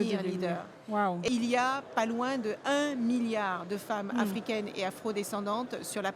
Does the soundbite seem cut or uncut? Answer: cut